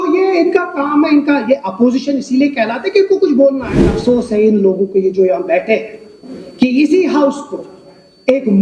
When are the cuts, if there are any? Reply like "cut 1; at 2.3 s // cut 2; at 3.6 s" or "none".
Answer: cut 1; at 3.9 s